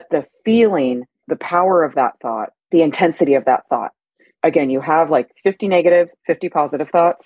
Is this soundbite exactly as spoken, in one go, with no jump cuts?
no; 3 cuts; at 1.3 s, 2.5 s, 4.4 s

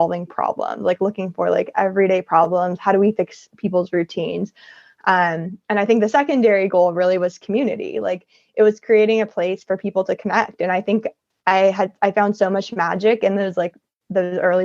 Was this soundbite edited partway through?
no; 0 cuts

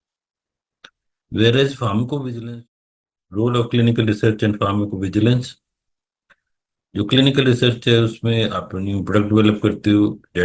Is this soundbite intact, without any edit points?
no; 1 cut; at 2.4 s

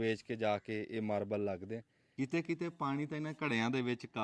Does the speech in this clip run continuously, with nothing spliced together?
no; 1 cut; at 2.0 s

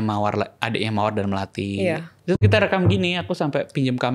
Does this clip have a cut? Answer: yes; 1 cut; at 2.1 s

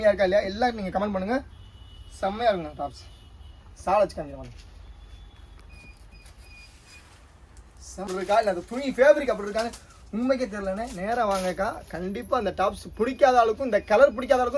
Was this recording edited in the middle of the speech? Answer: yes; 1 cut; at 8.1 s

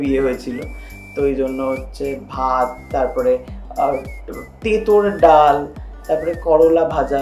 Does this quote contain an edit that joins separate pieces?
no; 0 cuts

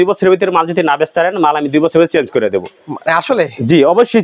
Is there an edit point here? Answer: no; 0 cuts

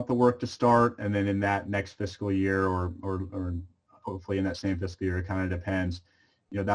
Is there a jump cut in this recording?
no; 0 cuts

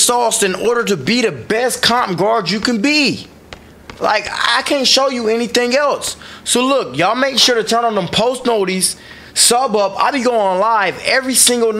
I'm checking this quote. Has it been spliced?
no; 0 cuts

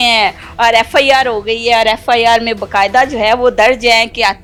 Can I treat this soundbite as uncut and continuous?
yes; 0 cuts

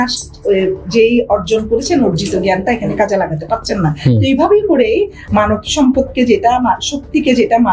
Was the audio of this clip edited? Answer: yes; 1 cut; at 5.2 s

